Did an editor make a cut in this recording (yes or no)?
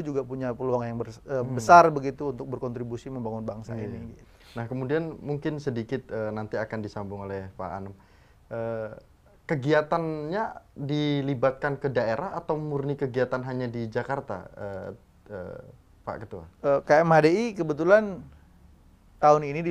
no